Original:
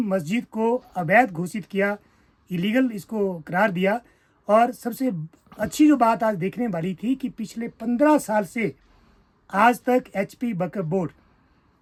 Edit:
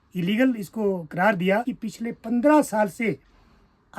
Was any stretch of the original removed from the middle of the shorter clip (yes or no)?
yes